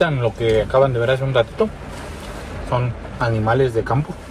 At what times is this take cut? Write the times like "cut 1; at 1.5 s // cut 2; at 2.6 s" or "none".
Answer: none